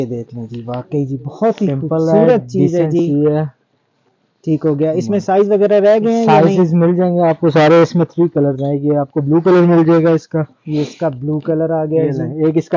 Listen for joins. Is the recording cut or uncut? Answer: uncut